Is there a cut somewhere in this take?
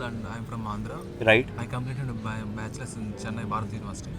no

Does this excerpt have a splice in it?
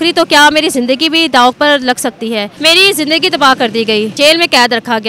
yes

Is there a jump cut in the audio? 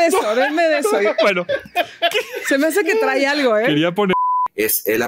yes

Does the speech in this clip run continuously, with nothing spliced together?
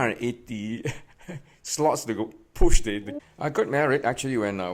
no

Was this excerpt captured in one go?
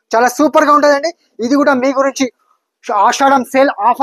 yes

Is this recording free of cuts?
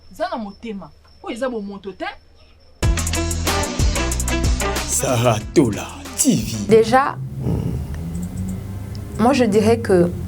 no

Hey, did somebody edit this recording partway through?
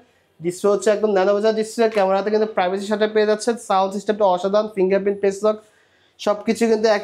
no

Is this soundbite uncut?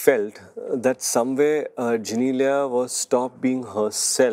yes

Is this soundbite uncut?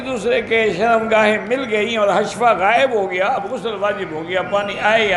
yes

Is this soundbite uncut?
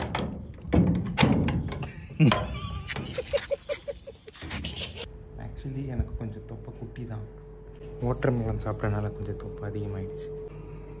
no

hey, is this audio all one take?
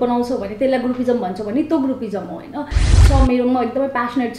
no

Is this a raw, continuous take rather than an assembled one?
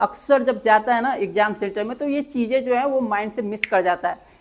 yes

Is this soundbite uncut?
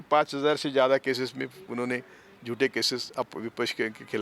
yes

